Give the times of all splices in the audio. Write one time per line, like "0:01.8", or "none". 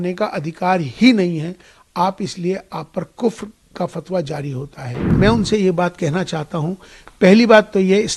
0:05.1